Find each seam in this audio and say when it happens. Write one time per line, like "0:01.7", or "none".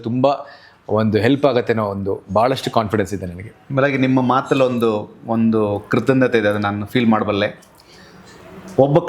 none